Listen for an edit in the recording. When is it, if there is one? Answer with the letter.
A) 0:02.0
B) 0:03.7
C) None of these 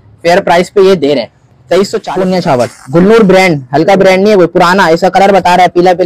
A